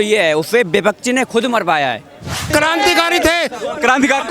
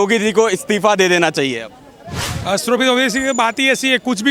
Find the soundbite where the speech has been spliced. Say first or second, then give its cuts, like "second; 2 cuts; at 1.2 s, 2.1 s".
first; 1 cut; at 2.5 s